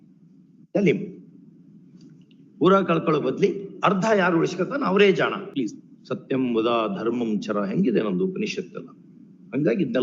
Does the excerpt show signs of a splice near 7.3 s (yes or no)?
no